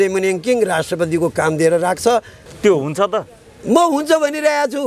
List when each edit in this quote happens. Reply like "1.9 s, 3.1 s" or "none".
2.4 s